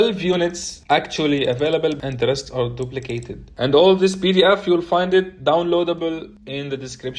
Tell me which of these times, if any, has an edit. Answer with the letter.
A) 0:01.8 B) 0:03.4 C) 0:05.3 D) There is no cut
B